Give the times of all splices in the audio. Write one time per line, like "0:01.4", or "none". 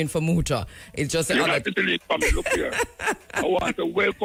none